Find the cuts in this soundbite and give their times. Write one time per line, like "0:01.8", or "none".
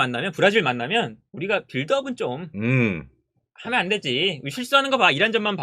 none